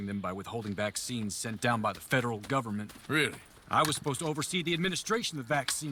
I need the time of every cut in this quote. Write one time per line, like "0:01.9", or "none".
none